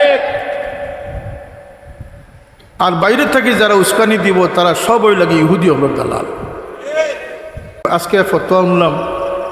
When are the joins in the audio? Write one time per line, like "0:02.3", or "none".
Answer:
0:07.8